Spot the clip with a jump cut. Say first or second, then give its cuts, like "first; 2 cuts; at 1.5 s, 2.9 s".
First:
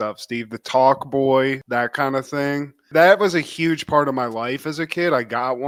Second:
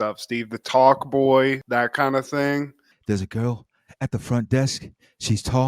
second; 1 cut; at 2.8 s